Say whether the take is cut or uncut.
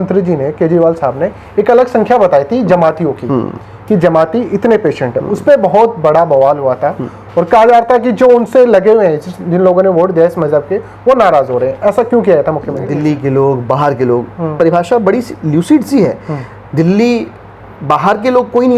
cut